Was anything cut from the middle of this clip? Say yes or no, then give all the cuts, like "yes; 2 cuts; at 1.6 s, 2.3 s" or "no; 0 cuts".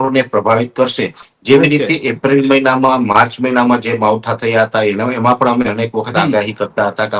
no; 0 cuts